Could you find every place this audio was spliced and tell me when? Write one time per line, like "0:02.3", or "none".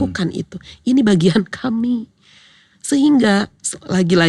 none